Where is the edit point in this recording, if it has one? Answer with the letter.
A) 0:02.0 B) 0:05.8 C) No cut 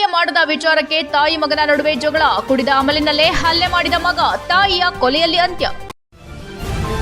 B